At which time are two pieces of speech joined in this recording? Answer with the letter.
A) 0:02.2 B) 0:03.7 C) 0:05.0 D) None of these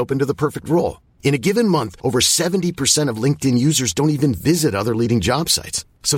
D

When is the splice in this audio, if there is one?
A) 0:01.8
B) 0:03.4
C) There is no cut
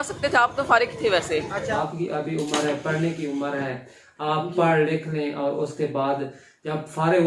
A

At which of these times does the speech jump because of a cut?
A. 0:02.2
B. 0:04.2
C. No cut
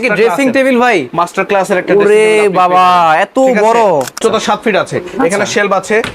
B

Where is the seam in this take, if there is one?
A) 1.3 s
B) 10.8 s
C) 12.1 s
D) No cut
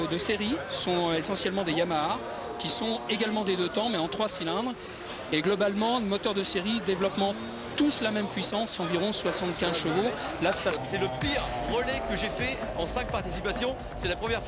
B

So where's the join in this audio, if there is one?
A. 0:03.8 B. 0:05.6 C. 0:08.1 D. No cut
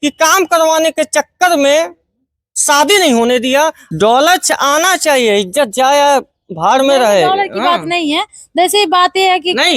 A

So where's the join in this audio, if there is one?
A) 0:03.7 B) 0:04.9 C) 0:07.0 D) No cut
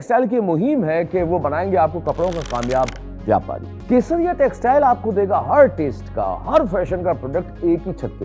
A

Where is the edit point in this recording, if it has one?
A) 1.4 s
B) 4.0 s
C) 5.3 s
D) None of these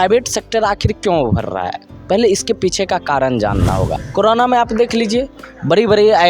B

